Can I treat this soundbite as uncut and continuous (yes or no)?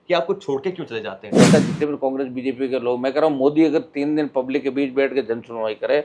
no